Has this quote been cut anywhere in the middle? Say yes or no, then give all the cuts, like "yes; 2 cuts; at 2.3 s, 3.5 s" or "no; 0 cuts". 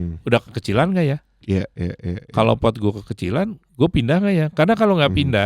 yes; 1 cut; at 1.3 s